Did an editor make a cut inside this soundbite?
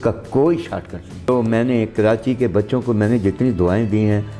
yes; 1 cut; at 1.3 s

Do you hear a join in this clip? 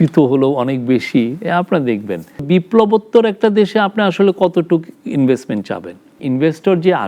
yes; 2 cuts; at 2.4 s, 6.2 s

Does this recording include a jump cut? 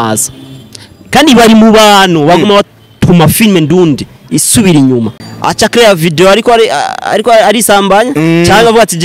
yes; 1 cut; at 5.2 s

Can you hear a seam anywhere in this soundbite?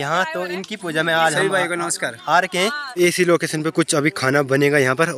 yes; 1 cut; at 2.8 s

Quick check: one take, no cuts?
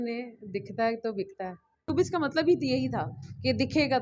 no; 1 cut; at 1.9 s

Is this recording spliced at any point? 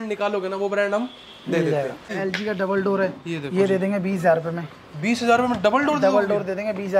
yes; 1 cut; at 2.1 s

